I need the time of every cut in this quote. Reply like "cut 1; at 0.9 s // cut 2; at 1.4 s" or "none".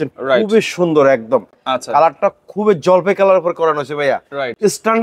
none